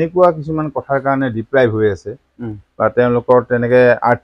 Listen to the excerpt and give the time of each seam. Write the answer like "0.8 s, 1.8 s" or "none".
none